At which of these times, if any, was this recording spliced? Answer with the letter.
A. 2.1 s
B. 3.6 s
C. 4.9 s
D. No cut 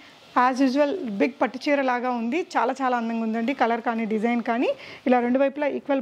D